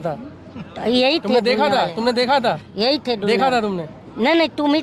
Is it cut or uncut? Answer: uncut